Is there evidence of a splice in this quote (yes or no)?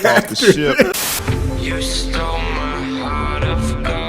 yes